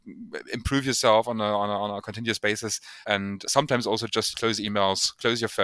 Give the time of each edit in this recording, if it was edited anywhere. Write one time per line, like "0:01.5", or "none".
0:02.9

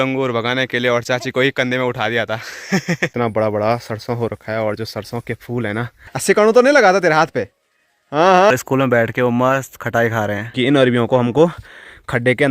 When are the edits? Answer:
0:03.1
0:06.1
0:08.5
0:10.5

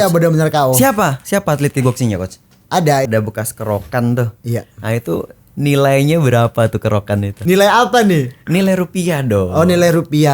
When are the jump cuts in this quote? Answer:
0:03.1
0:07.3

